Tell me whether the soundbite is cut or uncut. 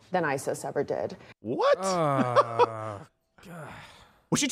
uncut